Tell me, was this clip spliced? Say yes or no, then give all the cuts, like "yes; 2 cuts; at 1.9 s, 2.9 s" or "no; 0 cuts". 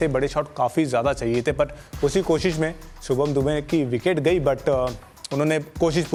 no; 0 cuts